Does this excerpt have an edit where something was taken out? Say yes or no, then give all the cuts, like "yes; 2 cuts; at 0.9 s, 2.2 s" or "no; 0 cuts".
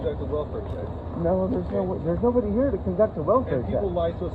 no; 0 cuts